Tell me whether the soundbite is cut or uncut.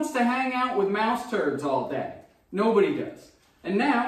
uncut